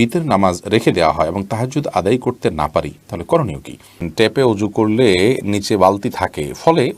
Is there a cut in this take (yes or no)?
yes